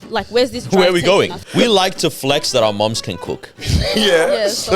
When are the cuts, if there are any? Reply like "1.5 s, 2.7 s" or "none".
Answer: 1.4 s